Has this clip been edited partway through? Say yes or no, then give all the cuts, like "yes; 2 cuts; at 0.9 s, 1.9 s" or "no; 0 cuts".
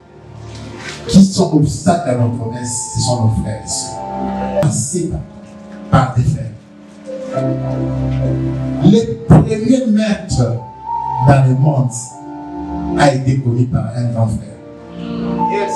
yes; 1 cut; at 4.6 s